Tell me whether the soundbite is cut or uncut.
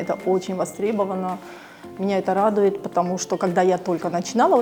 uncut